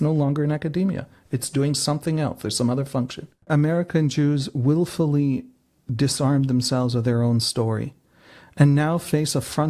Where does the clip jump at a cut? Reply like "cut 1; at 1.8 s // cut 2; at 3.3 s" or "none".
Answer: cut 1; at 3.4 s